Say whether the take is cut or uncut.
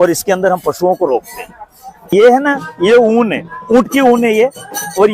cut